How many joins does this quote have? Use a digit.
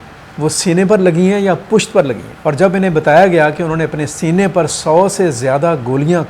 1